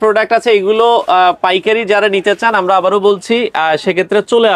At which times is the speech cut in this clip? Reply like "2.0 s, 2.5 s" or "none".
none